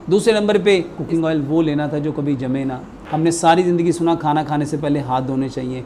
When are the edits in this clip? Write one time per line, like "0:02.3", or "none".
0:00.9
0:02.9